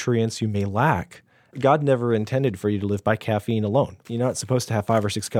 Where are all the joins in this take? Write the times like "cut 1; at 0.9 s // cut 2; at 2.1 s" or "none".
cut 1; at 1.6 s // cut 2; at 4.0 s